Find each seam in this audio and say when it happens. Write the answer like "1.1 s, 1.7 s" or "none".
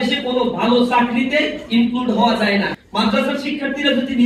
2.7 s